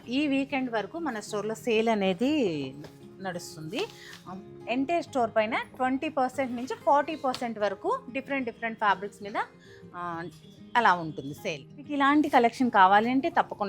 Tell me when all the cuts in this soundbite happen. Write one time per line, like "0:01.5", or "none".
0:11.9